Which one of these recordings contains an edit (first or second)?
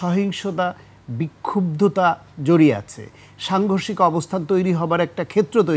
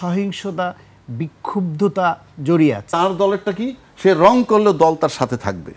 second